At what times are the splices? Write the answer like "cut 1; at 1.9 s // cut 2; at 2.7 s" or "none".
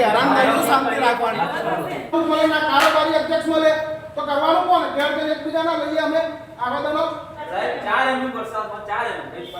cut 1; at 2.1 s // cut 2; at 7.4 s